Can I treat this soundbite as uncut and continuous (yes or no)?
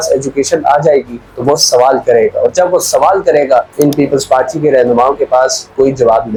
yes